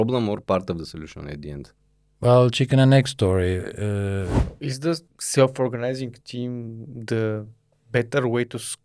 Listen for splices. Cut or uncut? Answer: cut